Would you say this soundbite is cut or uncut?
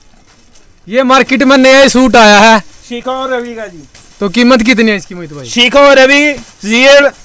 uncut